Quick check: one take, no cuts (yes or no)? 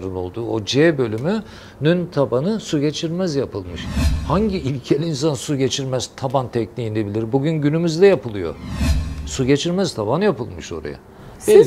yes